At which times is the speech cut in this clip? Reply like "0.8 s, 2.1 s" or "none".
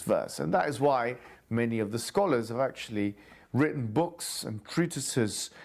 1.1 s

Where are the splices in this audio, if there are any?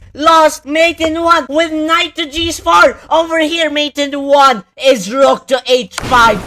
none

